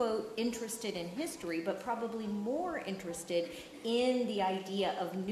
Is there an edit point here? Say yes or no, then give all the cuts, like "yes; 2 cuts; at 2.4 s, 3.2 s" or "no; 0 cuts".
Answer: no; 0 cuts